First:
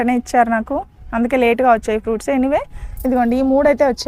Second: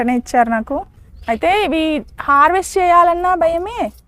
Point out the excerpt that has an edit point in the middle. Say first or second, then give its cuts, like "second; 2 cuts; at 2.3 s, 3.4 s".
second; 1 cut; at 1.0 s